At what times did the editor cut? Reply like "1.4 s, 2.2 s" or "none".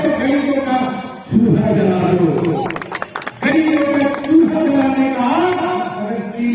none